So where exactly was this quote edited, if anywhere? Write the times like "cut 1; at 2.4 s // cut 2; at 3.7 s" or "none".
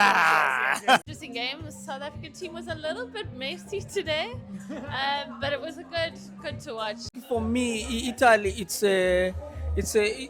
cut 1; at 1.0 s // cut 2; at 7.2 s